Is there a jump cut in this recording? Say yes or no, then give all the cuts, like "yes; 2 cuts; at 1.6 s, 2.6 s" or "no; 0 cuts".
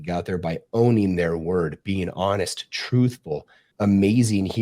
yes; 1 cut; at 3.6 s